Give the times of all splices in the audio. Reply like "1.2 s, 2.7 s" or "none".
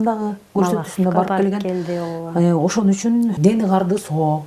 none